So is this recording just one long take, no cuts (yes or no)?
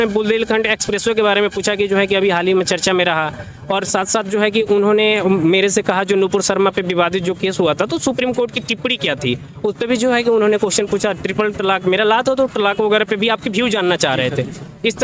yes